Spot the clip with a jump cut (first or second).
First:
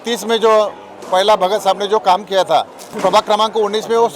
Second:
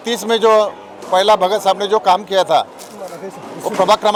first